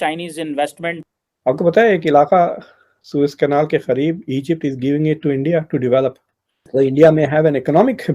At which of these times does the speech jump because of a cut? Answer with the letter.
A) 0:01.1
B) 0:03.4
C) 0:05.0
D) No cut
A